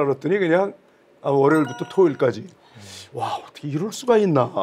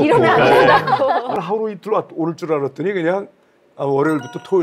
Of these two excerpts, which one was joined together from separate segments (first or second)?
second